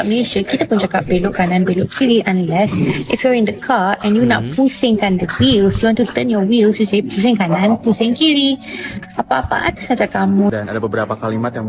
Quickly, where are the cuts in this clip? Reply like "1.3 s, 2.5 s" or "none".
10.4 s